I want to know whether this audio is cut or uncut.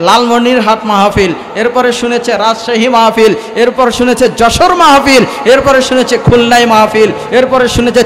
uncut